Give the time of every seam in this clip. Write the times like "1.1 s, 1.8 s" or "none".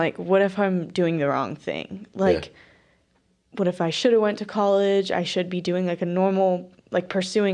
none